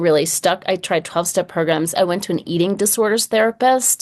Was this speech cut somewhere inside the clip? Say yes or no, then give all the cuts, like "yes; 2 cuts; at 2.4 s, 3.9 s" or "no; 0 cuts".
yes; 1 cut; at 2.0 s